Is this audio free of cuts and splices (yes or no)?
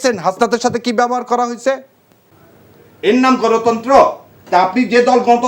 no